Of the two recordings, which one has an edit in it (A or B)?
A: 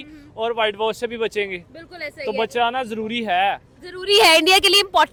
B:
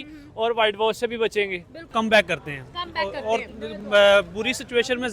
B